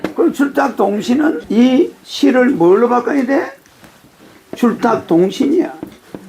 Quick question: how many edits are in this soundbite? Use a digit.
1